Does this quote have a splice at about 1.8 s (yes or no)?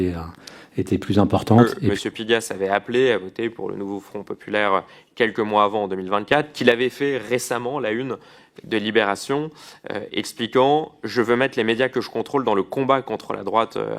yes